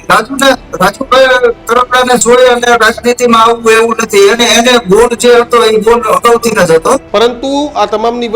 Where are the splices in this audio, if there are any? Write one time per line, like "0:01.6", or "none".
0:07.1